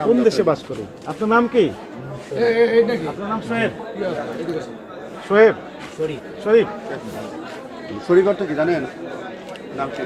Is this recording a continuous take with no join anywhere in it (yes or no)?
yes